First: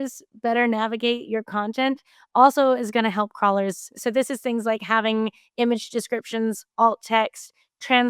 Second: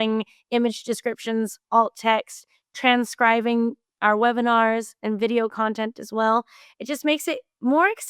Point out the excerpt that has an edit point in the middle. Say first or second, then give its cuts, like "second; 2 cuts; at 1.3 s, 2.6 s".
first; 1 cut; at 3.9 s